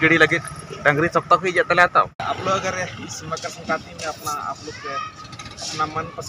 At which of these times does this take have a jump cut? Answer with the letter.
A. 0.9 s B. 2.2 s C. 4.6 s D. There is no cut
B